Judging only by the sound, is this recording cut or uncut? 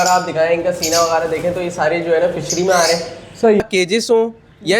cut